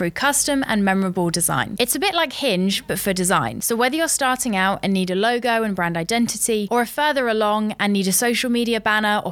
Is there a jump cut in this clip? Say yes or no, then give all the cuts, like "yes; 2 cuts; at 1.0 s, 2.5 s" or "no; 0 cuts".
no; 0 cuts